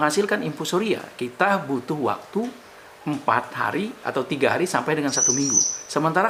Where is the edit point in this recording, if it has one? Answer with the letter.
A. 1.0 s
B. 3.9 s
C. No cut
C